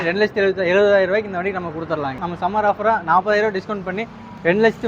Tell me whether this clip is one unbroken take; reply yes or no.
no